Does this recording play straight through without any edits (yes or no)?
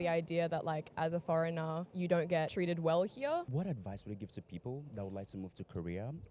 no